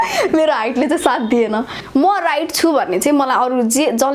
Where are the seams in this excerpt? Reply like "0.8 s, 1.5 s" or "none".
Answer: 1.8 s